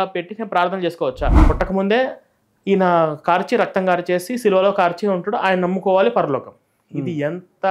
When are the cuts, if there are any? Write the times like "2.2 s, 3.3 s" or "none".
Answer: 1.4 s

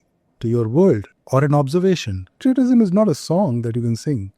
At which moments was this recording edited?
1.1 s, 2.4 s

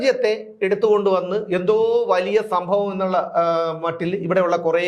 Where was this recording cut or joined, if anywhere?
none

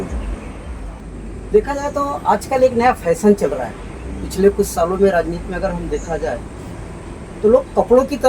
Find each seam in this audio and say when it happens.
0.9 s

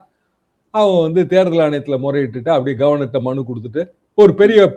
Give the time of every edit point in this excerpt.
none

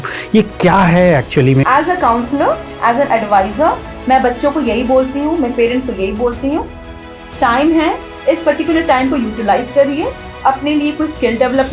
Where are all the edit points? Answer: 1.7 s

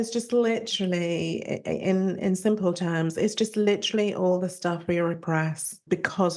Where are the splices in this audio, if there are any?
none

